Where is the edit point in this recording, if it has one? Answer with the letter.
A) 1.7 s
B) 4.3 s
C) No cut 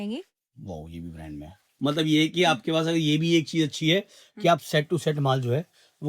A